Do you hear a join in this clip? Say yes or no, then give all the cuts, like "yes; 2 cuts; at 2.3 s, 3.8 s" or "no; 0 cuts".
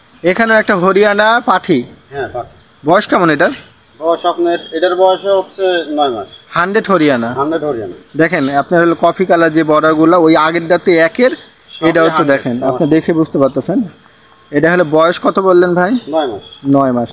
no; 0 cuts